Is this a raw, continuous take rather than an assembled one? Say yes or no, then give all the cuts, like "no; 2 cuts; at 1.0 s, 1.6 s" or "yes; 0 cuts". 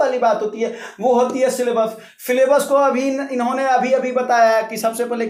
yes; 0 cuts